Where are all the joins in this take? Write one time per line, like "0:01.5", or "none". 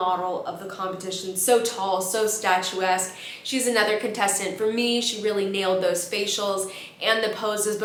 none